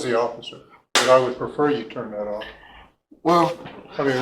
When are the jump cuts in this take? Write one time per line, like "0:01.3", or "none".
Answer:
0:01.0